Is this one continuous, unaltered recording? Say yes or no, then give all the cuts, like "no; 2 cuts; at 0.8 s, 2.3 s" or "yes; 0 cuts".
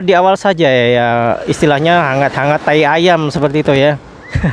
yes; 0 cuts